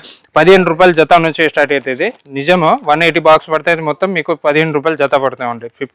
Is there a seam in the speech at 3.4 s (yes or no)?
no